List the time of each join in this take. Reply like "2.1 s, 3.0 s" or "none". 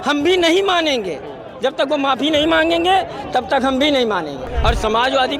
4.5 s